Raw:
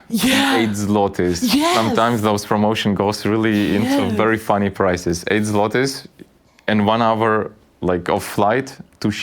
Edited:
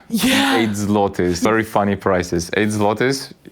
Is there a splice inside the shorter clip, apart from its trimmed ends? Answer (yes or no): yes